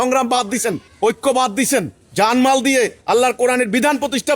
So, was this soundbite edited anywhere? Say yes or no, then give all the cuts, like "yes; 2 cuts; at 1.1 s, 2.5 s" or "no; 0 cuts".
yes; 3 cuts; at 0.9 s, 2.0 s, 3.0 s